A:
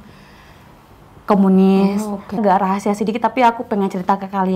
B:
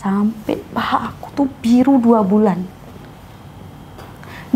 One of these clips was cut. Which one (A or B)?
A